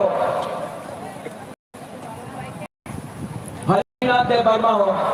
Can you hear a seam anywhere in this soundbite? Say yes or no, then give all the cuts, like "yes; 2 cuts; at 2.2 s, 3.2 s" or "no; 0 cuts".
no; 0 cuts